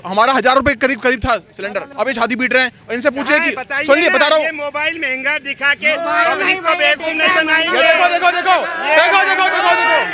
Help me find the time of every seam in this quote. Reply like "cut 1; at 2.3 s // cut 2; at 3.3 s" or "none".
cut 1; at 1.9 s